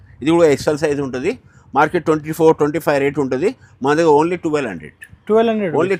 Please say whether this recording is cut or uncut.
uncut